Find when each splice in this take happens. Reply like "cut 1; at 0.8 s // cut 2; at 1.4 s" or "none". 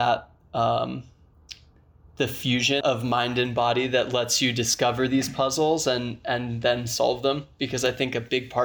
cut 1; at 2.8 s